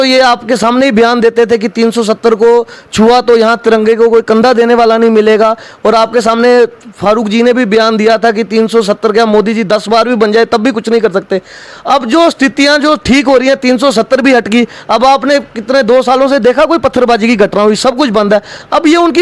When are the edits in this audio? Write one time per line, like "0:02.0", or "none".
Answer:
none